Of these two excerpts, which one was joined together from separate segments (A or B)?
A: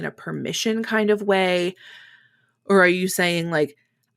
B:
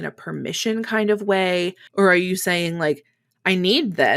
B